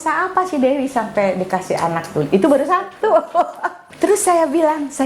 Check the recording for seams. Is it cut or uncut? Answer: cut